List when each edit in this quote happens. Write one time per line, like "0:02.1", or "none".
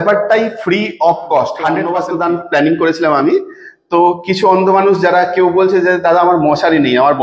0:01.8